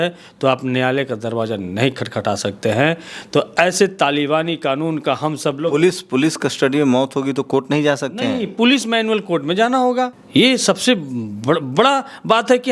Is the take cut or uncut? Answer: uncut